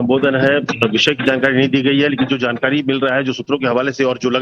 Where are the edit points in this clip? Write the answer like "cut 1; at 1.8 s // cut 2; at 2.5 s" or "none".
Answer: cut 1; at 2.4 s